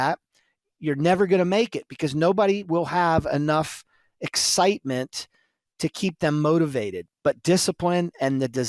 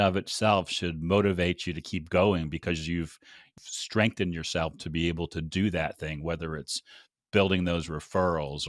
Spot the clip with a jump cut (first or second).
second